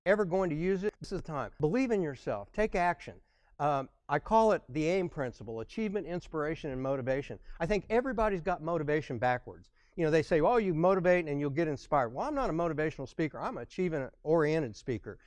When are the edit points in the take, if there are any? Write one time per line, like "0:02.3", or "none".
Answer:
0:01.1